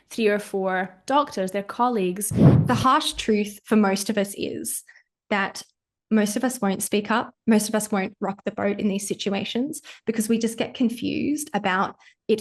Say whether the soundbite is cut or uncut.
cut